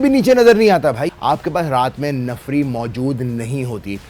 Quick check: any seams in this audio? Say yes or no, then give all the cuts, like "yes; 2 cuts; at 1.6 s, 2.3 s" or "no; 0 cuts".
yes; 1 cut; at 1.0 s